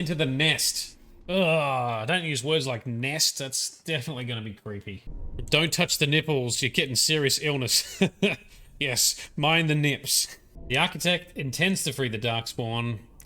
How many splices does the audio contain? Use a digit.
2